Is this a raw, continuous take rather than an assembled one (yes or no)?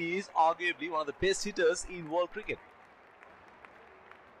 no